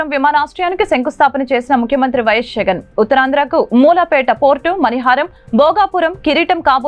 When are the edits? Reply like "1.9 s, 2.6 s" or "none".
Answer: none